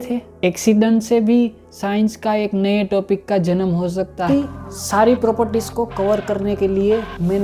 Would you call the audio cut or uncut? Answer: cut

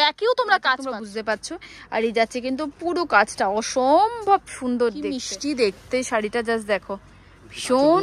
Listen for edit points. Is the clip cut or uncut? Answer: cut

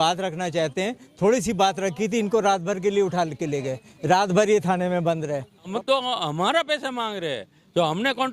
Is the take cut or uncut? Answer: cut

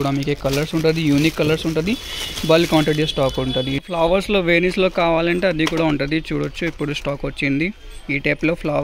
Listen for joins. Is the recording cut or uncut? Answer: cut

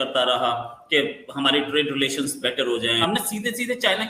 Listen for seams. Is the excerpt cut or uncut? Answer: cut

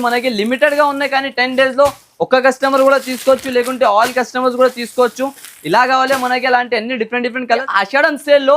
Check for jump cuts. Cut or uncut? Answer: cut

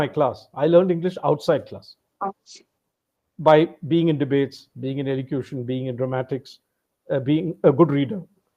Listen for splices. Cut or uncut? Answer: uncut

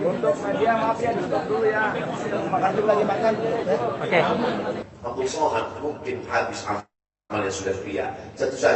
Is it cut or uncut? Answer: cut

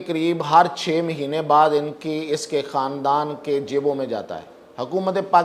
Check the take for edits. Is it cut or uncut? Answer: uncut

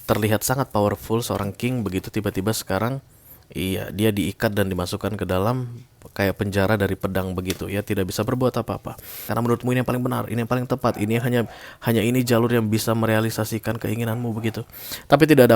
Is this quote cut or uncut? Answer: cut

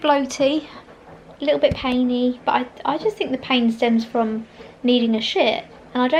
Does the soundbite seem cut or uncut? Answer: uncut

